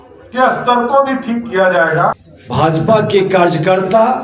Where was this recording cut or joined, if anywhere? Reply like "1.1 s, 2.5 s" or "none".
2.3 s